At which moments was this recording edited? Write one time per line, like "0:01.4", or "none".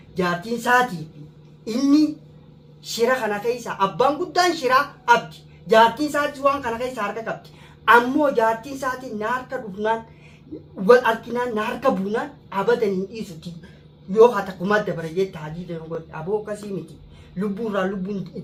none